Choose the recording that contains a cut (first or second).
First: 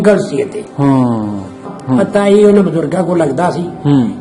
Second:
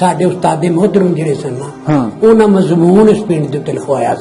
first